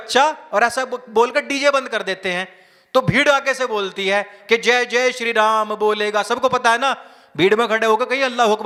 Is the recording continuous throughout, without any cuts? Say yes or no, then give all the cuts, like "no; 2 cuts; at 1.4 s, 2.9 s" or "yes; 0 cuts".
yes; 0 cuts